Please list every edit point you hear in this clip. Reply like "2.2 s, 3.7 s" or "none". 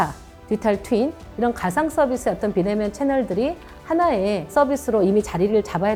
none